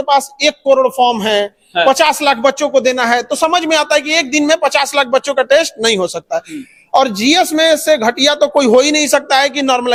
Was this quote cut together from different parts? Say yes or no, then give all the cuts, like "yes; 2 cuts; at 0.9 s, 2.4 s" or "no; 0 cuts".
no; 0 cuts